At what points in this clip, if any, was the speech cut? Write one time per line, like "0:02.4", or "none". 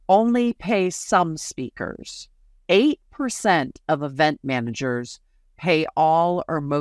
0:02.5